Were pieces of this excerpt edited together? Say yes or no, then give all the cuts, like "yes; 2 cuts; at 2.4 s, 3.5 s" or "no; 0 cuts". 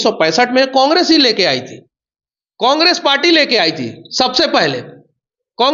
no; 0 cuts